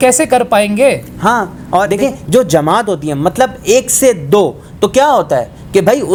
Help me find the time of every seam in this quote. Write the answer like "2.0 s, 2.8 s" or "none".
none